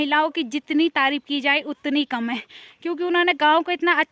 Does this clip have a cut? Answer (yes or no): no